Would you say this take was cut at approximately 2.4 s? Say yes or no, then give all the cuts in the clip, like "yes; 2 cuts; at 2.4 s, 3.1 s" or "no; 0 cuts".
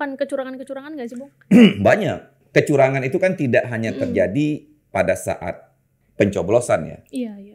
yes; 1 cut; at 2.4 s